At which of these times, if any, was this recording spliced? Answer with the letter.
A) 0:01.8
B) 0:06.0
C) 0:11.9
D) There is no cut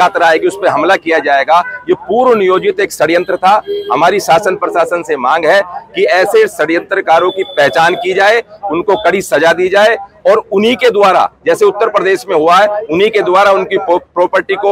D